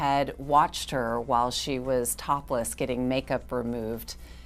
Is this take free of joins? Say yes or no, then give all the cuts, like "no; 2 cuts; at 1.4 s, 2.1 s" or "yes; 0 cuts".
yes; 0 cuts